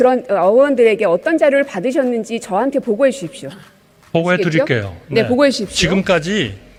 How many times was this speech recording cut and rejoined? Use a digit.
0